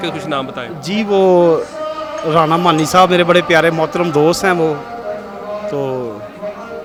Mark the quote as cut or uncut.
uncut